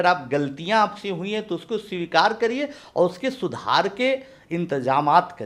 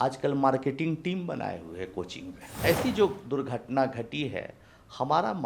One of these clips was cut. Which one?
second; 1 cut; at 2.4 s

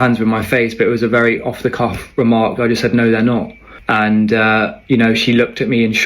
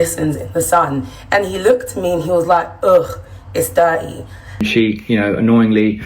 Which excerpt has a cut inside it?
second; 1 cut; at 4.7 s

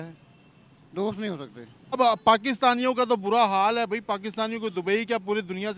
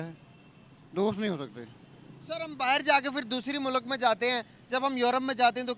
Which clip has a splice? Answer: first; 1 cut; at 2.0 s

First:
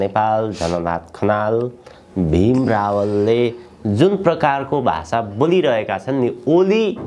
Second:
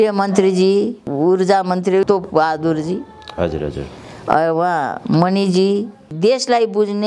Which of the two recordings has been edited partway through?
second; 3 cuts; at 1.1 s, 2.1 s, 6.0 s

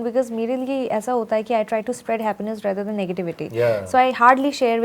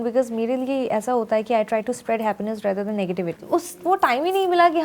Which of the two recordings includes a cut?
second; 1 cut; at 3.4 s

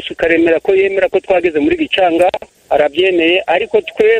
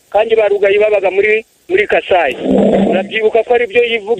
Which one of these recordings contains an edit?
first; 1 cut; at 2.5 s

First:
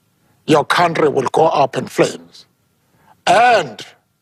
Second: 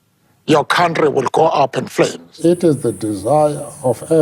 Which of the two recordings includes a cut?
second; 1 cut; at 2.3 s

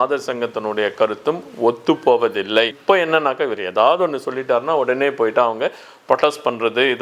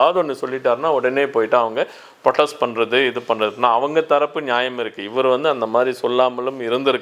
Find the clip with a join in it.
first; 1 cut; at 2.7 s

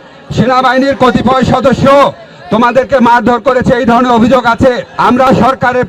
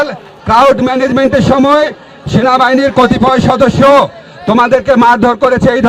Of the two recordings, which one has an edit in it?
first; 1 cut; at 4.9 s

